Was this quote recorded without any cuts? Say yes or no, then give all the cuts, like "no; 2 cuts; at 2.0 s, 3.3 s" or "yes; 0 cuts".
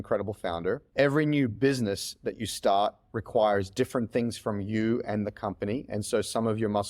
yes; 0 cuts